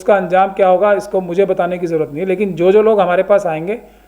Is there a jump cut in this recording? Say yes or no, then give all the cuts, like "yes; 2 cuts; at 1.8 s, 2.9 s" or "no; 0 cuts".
no; 0 cuts